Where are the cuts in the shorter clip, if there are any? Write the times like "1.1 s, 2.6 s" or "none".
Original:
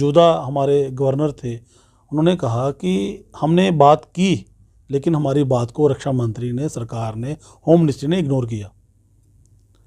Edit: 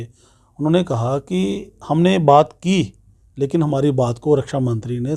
none